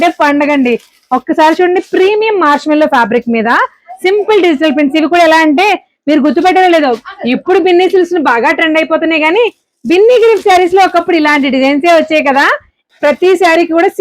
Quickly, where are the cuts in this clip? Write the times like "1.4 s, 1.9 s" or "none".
12.8 s